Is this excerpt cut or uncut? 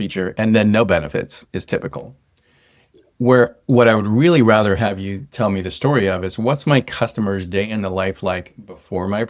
uncut